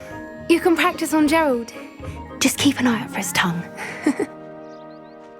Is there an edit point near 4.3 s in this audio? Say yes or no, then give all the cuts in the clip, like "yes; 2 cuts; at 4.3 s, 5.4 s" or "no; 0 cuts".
yes; 1 cut; at 4.3 s